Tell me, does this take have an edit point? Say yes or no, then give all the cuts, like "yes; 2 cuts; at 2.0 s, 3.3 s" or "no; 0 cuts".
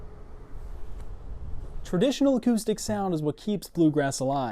yes; 1 cut; at 1.7 s